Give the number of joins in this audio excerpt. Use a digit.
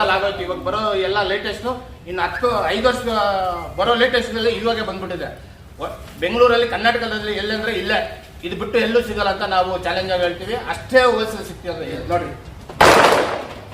1